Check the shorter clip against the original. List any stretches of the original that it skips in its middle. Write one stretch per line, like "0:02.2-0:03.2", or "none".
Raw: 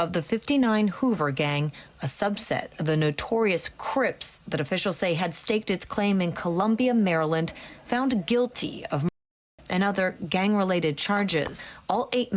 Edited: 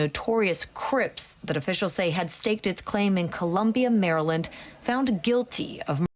none